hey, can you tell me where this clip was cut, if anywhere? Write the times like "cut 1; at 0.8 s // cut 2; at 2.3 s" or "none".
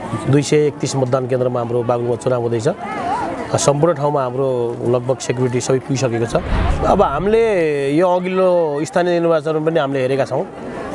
cut 1; at 6.6 s